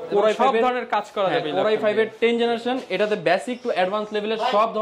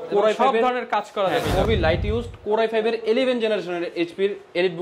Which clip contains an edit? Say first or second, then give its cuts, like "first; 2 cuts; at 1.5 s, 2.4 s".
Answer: second; 1 cut; at 1.6 s